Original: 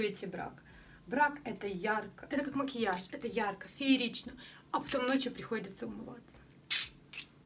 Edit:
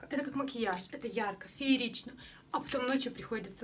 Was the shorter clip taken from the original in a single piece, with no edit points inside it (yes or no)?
yes